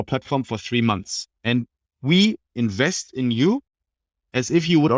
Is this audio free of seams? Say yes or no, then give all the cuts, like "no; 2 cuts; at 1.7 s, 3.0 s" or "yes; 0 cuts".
yes; 0 cuts